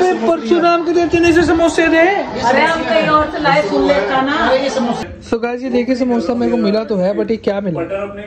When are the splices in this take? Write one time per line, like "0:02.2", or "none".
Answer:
0:05.0

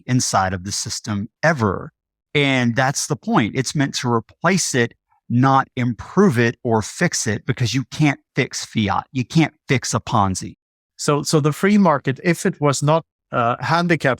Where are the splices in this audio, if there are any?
0:10.5
0:13.2

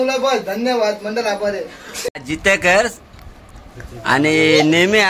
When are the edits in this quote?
0:02.2

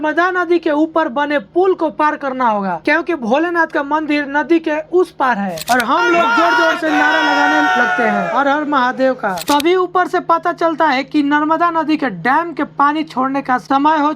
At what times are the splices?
0:05.6
0:09.4

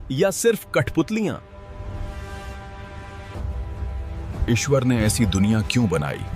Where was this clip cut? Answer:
0:03.4

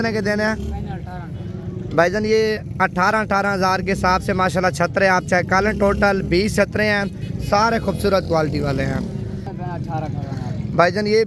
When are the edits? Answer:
0:09.5

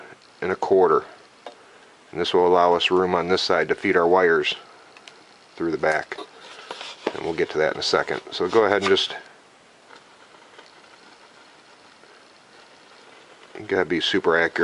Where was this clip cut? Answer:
0:11.8

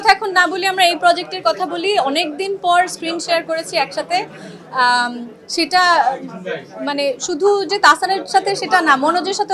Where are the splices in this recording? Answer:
none

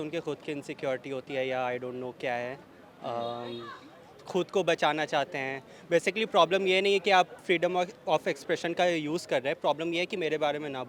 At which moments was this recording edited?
none

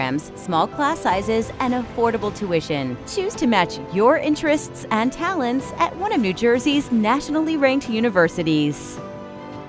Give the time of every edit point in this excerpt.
0:08.8

